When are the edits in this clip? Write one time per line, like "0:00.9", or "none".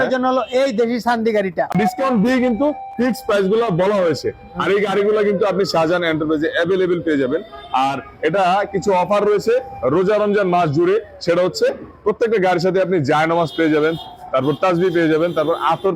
0:01.7